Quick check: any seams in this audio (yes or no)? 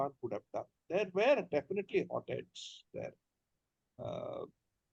no